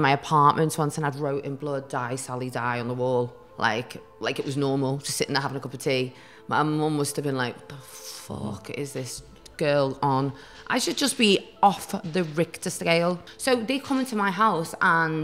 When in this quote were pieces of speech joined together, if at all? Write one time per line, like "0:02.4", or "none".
0:13.3